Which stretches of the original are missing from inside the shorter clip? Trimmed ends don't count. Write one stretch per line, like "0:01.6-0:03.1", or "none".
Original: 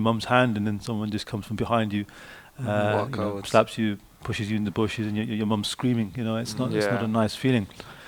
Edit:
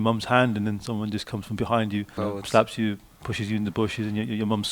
0:02.1-0:03.1